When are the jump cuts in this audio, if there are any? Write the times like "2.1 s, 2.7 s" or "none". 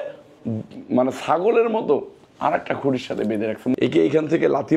3.7 s